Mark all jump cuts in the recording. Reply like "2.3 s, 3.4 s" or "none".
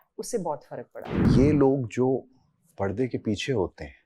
1.2 s